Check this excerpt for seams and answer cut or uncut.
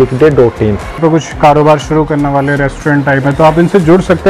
cut